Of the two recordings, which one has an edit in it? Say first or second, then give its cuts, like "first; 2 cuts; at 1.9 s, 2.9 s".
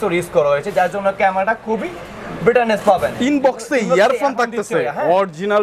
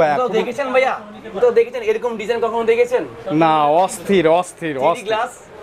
first; 1 cut; at 3.2 s